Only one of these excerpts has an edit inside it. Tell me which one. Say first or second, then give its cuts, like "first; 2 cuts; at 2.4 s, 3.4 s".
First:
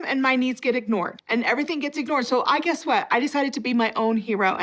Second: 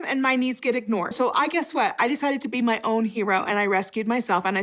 second; 1 cut; at 1.1 s